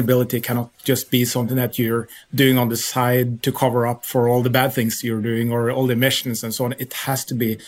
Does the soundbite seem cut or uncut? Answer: uncut